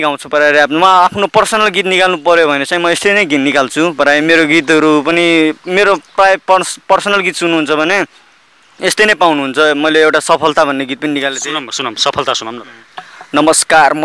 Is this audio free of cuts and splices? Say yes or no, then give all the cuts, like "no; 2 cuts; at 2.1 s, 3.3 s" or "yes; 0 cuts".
yes; 0 cuts